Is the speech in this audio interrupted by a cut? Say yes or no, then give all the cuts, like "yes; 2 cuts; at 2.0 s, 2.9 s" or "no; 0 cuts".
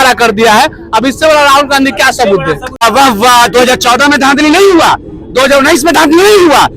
yes; 1 cut; at 2.8 s